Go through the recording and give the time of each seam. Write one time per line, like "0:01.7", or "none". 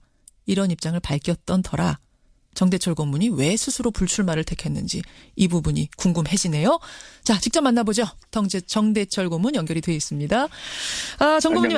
0:01.6